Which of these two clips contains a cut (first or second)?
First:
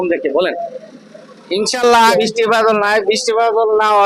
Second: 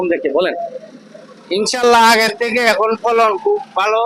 first